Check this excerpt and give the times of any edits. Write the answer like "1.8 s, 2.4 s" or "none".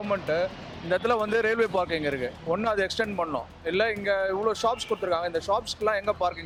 none